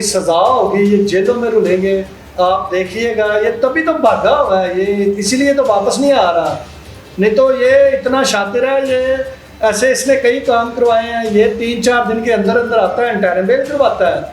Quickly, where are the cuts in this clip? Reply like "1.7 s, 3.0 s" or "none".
none